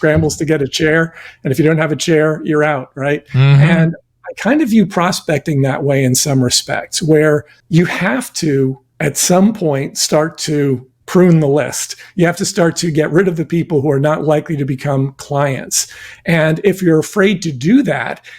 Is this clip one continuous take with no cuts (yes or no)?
no